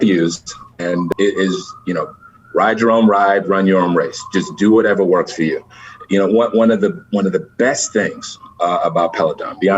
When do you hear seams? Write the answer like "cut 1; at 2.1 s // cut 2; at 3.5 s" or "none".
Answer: cut 1; at 1.1 s